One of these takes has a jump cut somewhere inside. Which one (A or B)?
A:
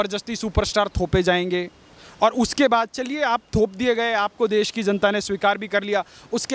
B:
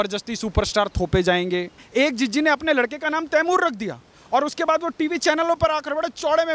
B